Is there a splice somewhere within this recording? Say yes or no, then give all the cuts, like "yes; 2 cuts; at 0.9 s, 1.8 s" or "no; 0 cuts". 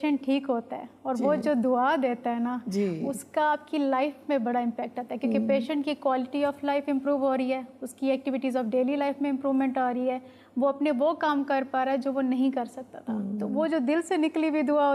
no; 0 cuts